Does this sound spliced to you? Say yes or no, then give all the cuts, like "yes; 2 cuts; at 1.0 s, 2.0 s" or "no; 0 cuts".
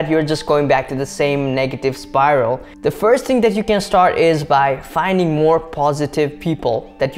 yes; 1 cut; at 2.7 s